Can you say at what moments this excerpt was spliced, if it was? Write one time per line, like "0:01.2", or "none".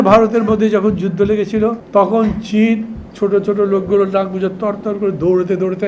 0:01.8